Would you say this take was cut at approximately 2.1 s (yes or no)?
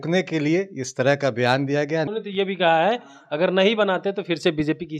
yes